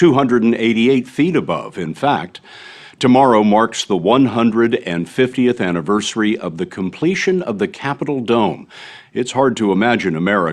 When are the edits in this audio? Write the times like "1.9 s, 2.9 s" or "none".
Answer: 6.5 s